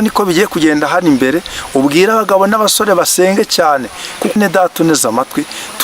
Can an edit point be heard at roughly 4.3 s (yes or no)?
yes